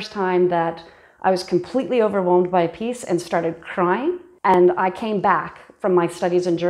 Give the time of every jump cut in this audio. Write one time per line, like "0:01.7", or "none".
0:04.5